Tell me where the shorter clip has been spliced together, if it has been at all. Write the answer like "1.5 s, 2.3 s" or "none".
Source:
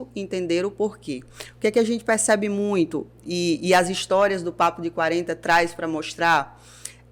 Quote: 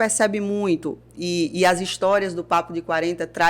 none